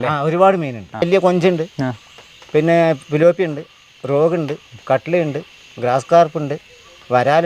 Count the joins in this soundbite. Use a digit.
1